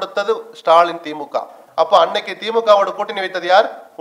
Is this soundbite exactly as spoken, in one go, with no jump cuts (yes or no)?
no